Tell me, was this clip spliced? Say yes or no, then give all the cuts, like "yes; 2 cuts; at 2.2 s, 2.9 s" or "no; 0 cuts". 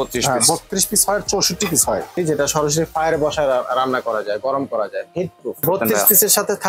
yes; 2 cuts; at 2.2 s, 5.6 s